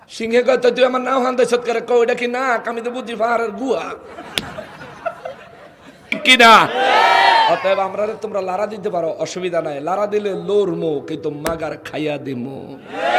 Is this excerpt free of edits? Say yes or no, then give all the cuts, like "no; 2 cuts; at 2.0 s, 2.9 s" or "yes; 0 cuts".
no; 1 cut; at 6.2 s